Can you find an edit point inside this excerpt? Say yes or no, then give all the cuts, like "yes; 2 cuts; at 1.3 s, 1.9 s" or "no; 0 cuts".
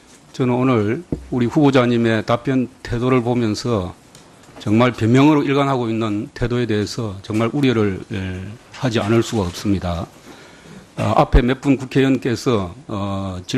no; 0 cuts